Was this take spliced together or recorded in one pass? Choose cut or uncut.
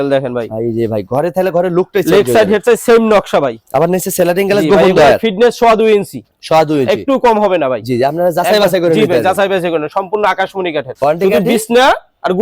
uncut